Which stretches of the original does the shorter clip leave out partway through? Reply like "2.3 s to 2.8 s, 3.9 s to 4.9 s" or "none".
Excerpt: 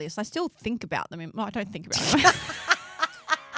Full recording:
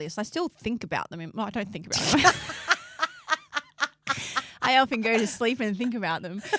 none